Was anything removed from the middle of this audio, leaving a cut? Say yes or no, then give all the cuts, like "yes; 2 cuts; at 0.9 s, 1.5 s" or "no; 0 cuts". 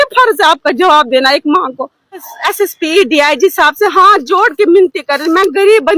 yes; 1 cut; at 2.3 s